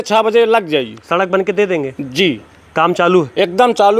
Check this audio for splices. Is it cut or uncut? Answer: uncut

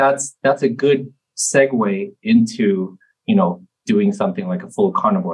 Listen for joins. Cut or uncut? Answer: uncut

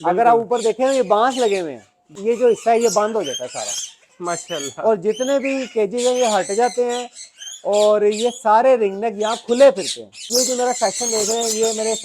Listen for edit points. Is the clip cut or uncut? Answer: cut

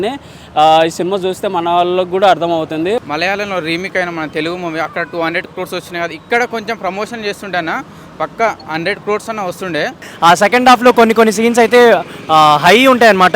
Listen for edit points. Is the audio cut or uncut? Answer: cut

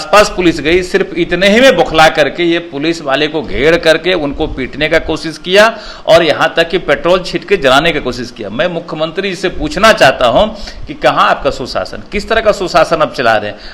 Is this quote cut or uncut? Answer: uncut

